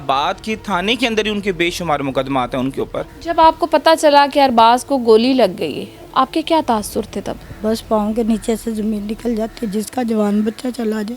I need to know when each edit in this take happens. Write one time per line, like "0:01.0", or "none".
0:03.1
0:07.4